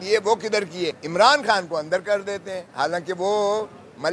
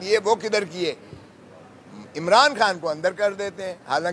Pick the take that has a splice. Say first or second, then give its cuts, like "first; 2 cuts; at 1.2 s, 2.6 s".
first; 1 cut; at 1.0 s